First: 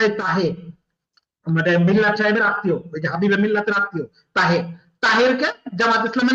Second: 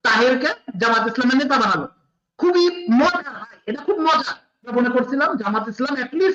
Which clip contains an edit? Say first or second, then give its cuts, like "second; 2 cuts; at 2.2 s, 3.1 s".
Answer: second; 1 cut; at 4.7 s